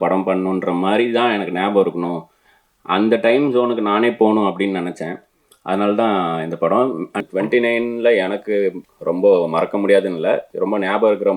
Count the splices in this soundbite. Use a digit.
3